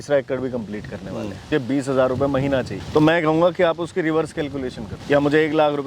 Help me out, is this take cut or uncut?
cut